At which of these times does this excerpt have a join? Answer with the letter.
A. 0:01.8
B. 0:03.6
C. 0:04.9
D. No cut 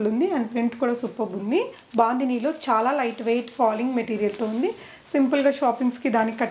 A